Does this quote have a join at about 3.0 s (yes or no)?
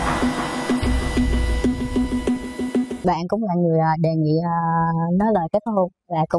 yes